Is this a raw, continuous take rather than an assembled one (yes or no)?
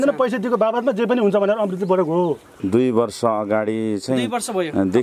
no